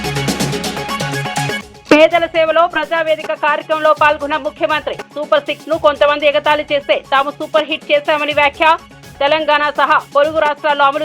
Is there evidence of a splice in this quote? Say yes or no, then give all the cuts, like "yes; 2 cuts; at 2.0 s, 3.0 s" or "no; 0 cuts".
yes; 1 cut; at 1.6 s